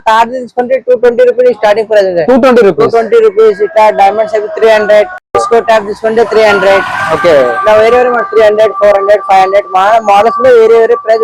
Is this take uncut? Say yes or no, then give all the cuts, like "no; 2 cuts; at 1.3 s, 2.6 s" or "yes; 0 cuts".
yes; 0 cuts